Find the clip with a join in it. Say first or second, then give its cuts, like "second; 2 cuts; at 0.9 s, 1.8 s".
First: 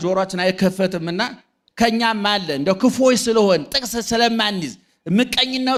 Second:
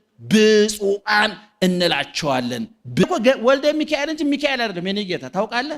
second; 1 cut; at 3.0 s